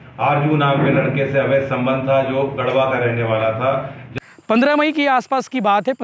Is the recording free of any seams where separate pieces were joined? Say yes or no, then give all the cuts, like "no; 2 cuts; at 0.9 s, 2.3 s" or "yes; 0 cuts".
no; 1 cut; at 4.0 s